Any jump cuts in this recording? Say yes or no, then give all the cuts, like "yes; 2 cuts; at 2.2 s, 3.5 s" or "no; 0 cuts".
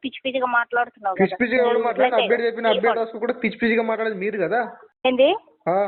no; 0 cuts